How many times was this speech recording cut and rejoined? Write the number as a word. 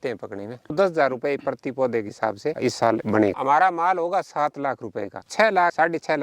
three